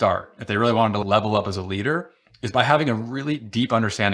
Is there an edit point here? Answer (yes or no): yes